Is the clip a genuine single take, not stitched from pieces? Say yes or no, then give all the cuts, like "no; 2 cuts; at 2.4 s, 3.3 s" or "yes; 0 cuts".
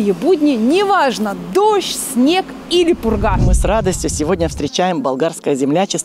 no; 1 cut; at 3.5 s